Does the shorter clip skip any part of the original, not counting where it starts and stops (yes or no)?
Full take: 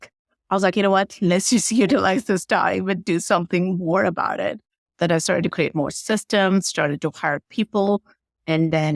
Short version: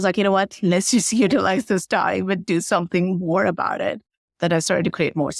no